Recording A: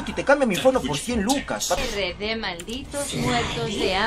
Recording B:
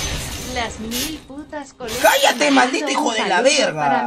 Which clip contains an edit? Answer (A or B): A